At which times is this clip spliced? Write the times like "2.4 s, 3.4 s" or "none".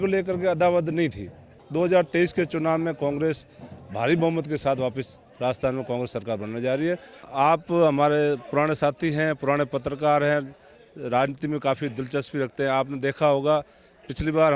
1.6 s, 7.3 s

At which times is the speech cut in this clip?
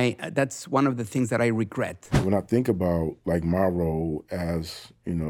2.2 s

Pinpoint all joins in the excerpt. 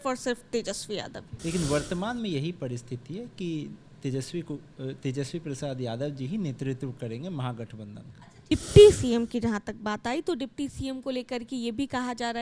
1.3 s, 8.5 s

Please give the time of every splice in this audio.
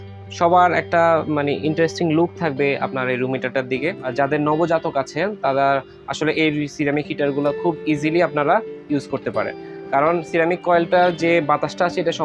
4.0 s

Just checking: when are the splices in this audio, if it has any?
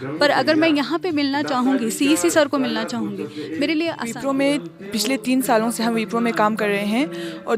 4.1 s

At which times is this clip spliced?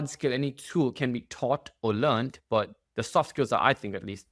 none

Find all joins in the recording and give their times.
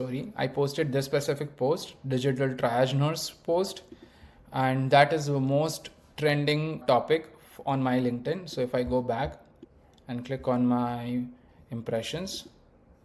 none

